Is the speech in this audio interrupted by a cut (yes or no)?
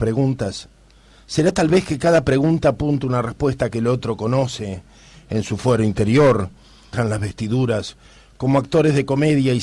no